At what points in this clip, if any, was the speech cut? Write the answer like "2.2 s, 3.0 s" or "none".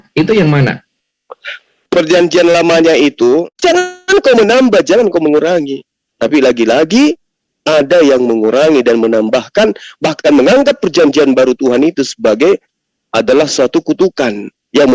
3.5 s